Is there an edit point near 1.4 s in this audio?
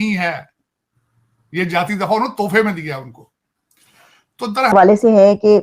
no; 1 cut; at 4.7 s

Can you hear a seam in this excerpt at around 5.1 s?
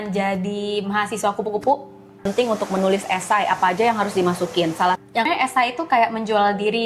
yes; 2 cuts; at 2.2 s, 5.1 s

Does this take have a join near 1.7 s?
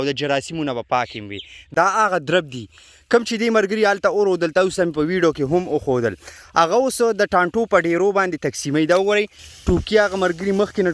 yes; 1 cut; at 1.7 s

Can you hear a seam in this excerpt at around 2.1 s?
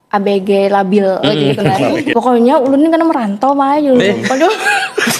yes; 1 cut; at 2.1 s

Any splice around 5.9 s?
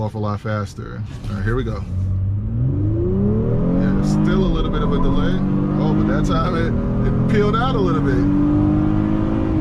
no; 0 cuts

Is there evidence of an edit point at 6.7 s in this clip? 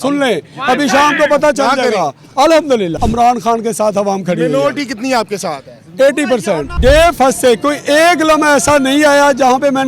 yes; 2 cuts; at 3.0 s, 6.7 s

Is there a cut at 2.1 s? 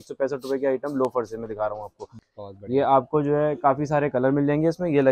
yes; 1 cut; at 2.1 s

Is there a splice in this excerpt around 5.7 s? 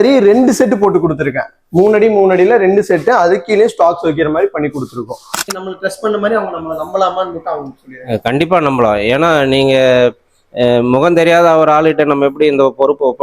yes; 1 cut; at 5.7 s

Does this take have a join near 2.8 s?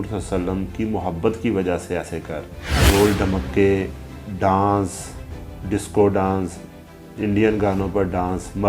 yes; 1 cut; at 2.8 s

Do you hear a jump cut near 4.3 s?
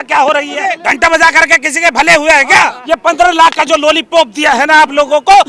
no; 2 cuts; at 0.8 s, 2.8 s

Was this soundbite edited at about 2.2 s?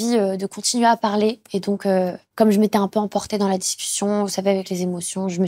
yes; 1 cut; at 2.2 s

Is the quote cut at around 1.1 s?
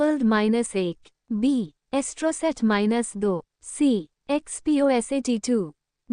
yes; 1 cut; at 1.1 s

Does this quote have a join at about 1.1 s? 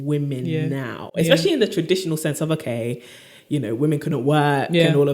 no; 0 cuts

